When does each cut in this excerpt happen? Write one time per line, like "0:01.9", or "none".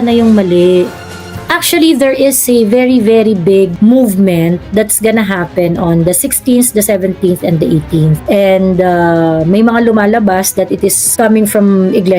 0:01.1
0:11.0